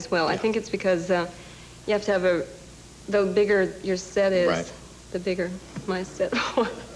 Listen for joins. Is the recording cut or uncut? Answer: uncut